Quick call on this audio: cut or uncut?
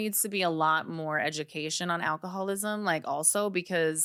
uncut